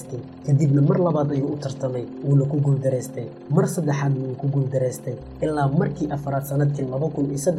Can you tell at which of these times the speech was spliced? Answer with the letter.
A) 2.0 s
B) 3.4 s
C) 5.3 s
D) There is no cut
D